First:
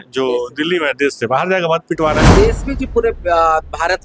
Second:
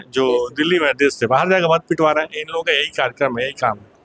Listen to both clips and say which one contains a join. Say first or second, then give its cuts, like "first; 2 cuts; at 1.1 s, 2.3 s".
first; 1 cut; at 2.3 s